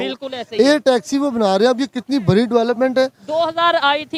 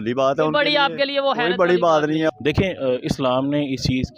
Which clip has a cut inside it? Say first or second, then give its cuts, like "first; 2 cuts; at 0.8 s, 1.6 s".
second; 1 cut; at 2.3 s